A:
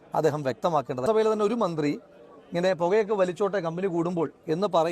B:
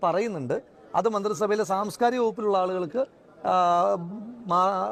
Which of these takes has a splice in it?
A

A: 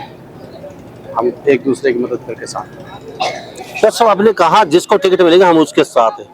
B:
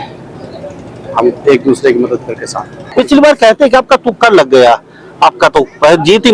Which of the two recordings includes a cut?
B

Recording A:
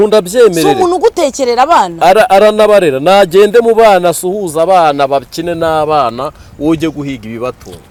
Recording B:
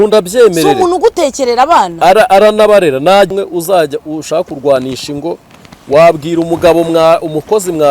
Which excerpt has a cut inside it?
B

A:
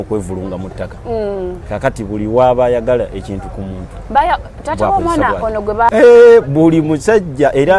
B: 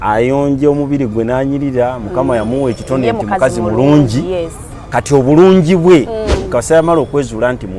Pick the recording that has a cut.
A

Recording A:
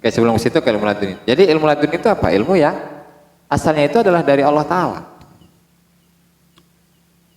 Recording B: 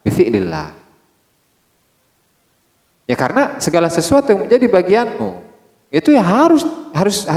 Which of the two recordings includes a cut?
A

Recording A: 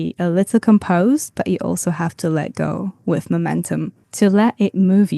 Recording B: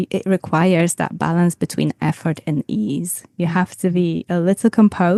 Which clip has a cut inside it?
A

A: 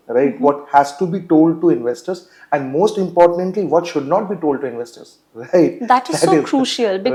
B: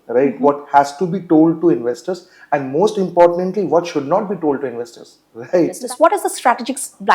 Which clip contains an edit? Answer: B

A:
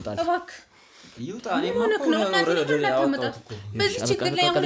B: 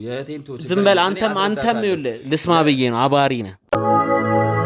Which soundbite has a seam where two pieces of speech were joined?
B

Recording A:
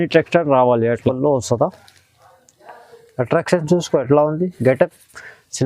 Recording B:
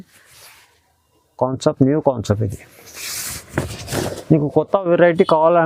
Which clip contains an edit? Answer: A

